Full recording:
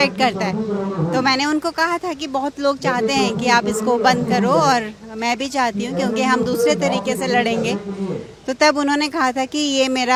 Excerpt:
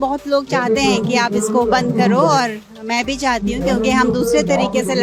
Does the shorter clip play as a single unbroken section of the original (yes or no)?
yes